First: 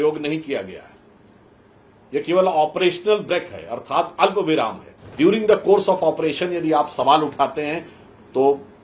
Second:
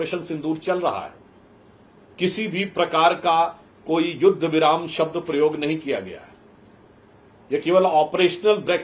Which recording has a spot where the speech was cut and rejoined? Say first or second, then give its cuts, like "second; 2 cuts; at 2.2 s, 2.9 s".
first; 1 cut; at 5.1 s